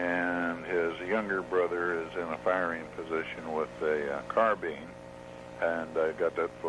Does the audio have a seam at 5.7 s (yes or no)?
no